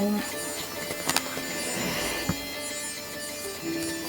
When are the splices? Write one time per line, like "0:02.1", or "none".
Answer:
none